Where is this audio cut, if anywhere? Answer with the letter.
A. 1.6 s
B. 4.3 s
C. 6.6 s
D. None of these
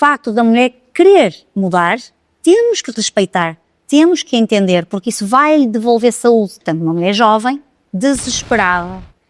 C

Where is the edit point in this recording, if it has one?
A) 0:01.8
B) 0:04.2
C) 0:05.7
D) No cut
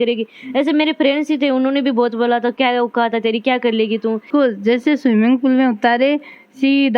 B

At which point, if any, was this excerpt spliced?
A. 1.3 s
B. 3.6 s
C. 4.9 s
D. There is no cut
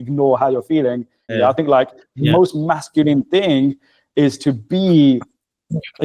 A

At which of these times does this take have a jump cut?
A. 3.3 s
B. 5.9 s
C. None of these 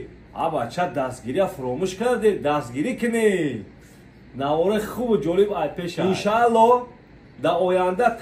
B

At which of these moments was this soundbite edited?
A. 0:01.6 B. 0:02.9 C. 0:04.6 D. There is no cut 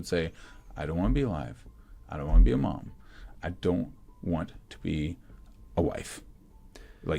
D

